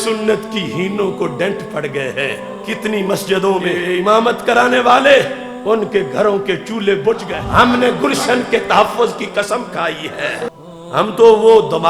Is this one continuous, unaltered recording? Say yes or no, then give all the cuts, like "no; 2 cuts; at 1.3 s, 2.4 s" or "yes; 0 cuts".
no; 4 cuts; at 3.8 s, 5.4 s, 7.3 s, 10.5 s